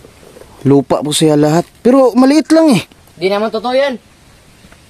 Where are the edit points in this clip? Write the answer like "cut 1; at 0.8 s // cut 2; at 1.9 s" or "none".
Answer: cut 1; at 3.0 s